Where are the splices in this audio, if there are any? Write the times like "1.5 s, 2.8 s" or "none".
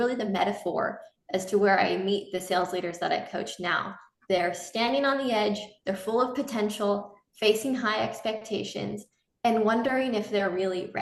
none